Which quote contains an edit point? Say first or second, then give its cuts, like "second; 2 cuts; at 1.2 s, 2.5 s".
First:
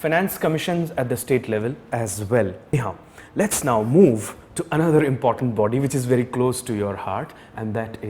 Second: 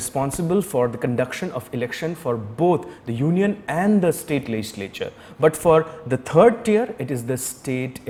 first; 1 cut; at 2.7 s